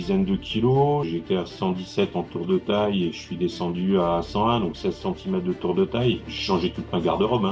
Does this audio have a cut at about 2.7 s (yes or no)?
no